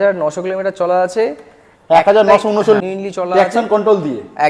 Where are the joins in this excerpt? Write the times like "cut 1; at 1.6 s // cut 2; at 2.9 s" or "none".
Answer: cut 1; at 2.8 s